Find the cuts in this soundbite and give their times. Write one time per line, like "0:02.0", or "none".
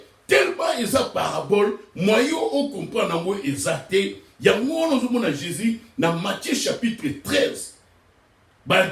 none